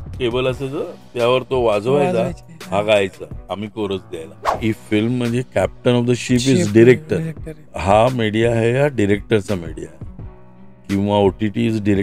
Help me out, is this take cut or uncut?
cut